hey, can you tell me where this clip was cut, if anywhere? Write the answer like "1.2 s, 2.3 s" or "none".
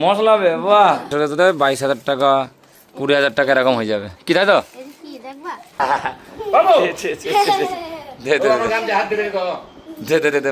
1.1 s, 5.8 s

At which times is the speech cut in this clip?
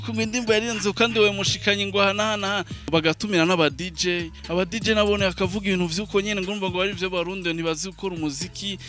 2.9 s

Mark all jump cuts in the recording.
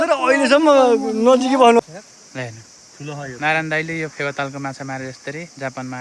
1.8 s

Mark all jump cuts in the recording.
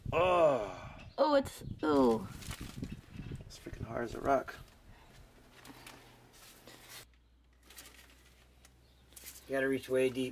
7.0 s

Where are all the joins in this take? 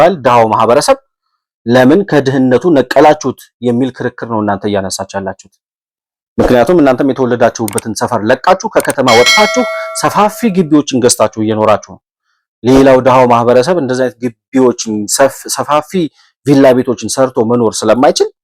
none

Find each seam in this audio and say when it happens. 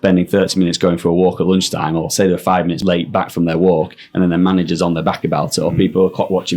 2.8 s

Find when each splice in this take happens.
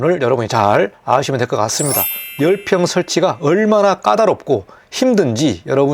2.2 s

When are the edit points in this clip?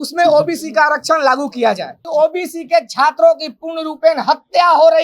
2.0 s

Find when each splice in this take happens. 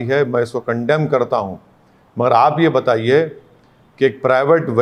none

